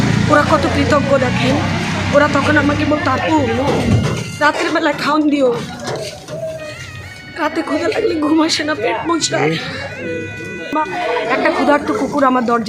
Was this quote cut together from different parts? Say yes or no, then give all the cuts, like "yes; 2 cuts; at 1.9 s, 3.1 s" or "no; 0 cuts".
yes; 1 cut; at 10.7 s